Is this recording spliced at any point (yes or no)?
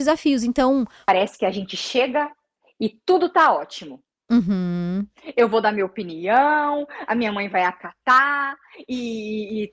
yes